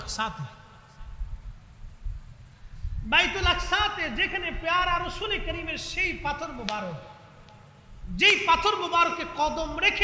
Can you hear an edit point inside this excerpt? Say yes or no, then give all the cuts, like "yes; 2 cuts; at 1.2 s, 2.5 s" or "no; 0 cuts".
no; 0 cuts